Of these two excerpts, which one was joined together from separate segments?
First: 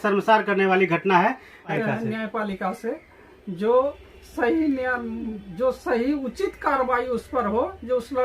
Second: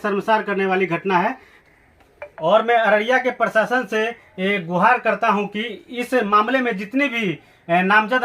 first; 1 cut; at 1.8 s

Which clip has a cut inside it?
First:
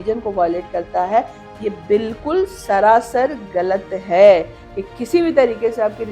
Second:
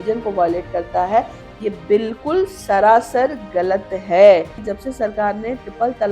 second; 1 cut; at 4.7 s

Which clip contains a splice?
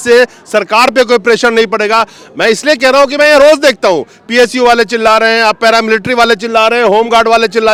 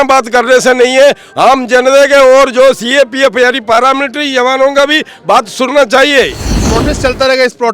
second; 1 cut; at 6.6 s

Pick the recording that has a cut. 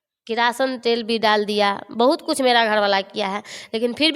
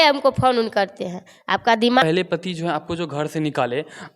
second; 1 cut; at 2.0 s

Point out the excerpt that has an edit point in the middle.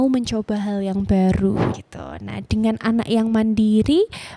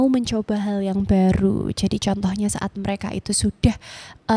first; 1 cut; at 1.7 s

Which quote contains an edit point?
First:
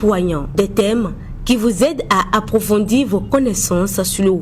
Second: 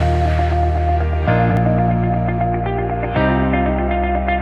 second; 1 cut; at 1.5 s

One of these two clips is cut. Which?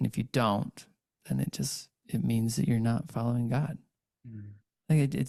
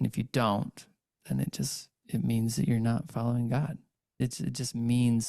second; 1 cut; at 4.2 s

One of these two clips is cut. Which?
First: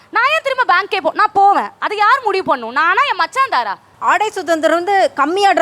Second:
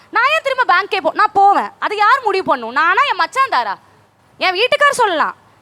first; 1 cut; at 3.8 s

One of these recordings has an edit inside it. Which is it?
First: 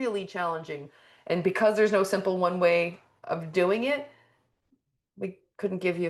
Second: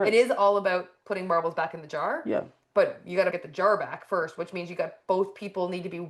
second; 1 cut; at 3.4 s

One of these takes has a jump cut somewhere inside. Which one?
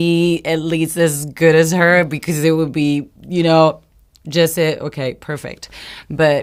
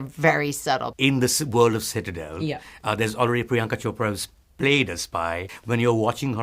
second; 2 cuts; at 0.9 s, 5.5 s

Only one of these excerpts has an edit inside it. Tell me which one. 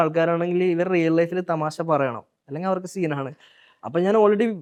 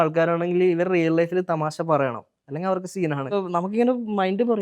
second; 1 cut; at 3.4 s

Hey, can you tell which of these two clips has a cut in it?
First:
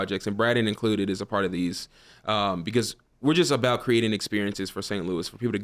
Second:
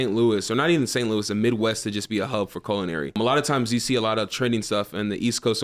second; 1 cut; at 3.2 s

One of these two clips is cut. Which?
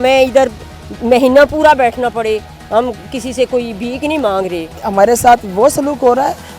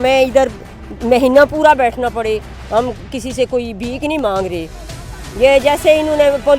first; 1 cut; at 4.8 s

